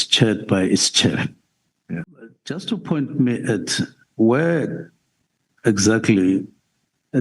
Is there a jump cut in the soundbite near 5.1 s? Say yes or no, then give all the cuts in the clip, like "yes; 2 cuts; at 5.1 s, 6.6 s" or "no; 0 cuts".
no; 1 cut; at 2.6 s